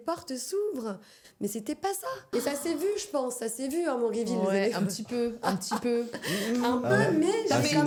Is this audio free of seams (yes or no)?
yes